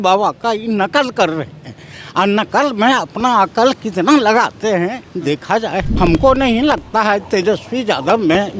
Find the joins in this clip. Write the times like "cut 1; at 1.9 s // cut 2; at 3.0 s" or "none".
cut 1; at 5.9 s